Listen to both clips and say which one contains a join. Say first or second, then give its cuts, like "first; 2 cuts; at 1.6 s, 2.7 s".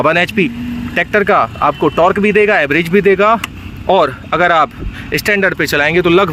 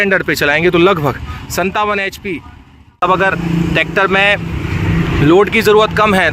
second; 1 cut; at 3.0 s